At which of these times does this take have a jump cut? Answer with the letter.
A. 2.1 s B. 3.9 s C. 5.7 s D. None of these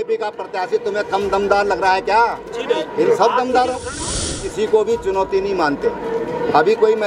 B